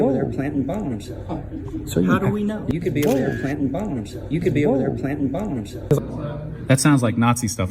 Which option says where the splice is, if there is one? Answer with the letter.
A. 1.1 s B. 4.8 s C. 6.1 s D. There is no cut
C